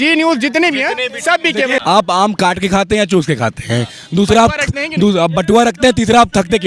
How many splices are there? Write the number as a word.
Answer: one